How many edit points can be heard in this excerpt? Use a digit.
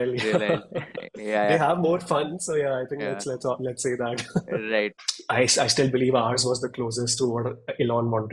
1